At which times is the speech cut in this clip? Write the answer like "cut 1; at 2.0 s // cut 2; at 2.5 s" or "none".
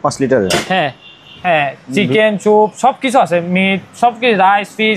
cut 1; at 1.3 s